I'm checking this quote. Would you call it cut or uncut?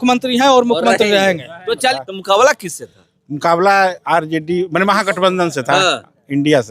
cut